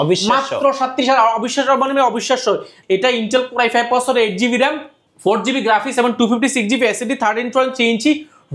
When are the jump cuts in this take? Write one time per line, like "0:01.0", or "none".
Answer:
0:02.7